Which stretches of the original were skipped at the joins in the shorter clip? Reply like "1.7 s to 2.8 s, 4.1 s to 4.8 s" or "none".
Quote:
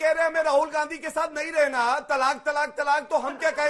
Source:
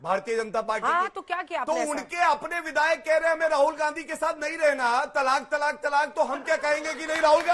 none